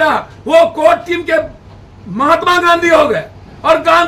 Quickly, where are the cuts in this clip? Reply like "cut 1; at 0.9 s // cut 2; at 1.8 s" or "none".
none

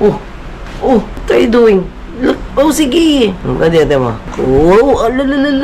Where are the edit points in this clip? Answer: cut 1; at 1.1 s // cut 2; at 2.4 s // cut 3; at 3.4 s // cut 4; at 4.2 s

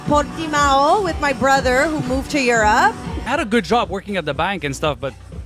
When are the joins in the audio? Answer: cut 1; at 3.1 s

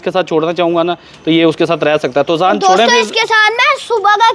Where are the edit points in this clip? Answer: none

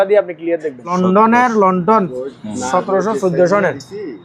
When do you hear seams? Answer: cut 1; at 0.9 s

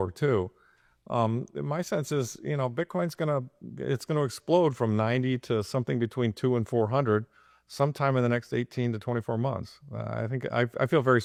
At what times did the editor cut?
none

